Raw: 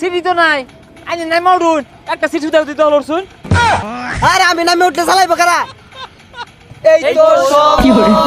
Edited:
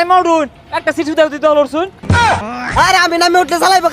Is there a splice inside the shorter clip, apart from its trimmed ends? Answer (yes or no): yes